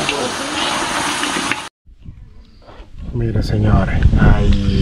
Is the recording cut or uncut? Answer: cut